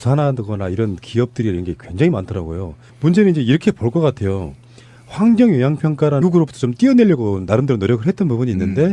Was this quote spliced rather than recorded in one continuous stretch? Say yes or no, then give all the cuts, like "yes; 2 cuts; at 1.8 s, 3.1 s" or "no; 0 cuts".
no; 0 cuts